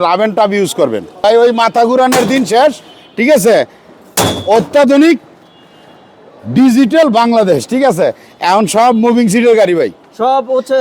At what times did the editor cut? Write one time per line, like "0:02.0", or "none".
0:01.2